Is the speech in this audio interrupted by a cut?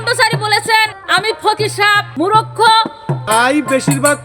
yes; 3 cuts; at 1.0 s, 2.1 s, 3.1 s

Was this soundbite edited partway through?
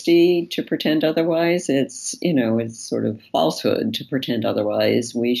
no; 0 cuts

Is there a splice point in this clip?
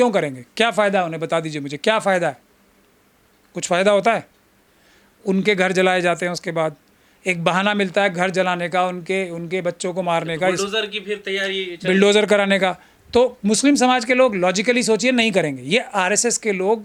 no; 0 cuts

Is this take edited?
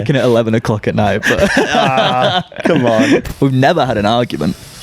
yes; 1 cut; at 3.3 s

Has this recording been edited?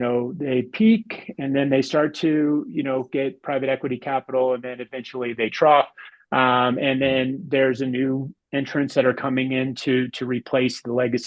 no; 0 cuts

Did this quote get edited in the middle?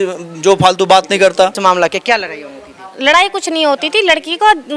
yes; 1 cut; at 1.6 s

